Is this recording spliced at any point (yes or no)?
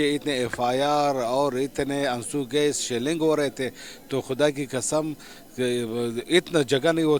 no